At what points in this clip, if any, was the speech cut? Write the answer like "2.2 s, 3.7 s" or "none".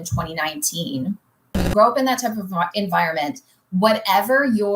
1.5 s